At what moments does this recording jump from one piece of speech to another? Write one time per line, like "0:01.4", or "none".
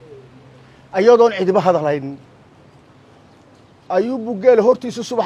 none